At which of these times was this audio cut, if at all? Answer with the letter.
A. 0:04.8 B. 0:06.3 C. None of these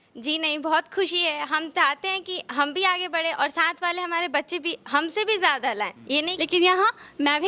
B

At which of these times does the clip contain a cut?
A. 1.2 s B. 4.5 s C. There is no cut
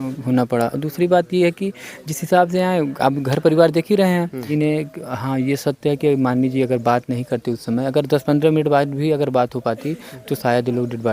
B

